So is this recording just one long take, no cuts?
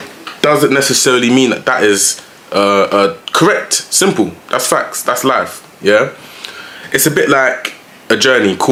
yes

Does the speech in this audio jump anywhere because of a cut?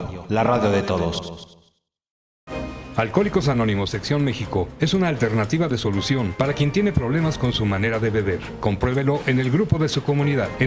yes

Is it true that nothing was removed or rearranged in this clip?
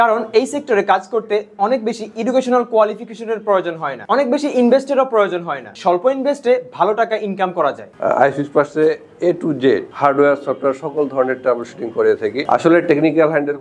no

